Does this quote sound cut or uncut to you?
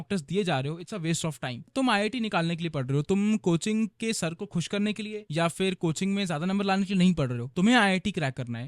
cut